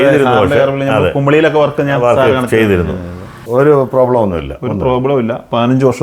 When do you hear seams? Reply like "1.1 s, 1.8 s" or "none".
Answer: 3.3 s